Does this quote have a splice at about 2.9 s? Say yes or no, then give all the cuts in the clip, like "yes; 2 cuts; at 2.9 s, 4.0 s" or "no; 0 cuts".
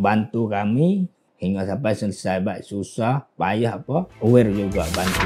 no; 2 cuts; at 1.2 s, 4.1 s